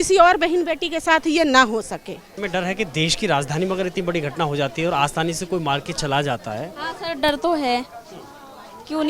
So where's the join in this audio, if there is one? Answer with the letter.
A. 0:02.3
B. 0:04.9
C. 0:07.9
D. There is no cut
A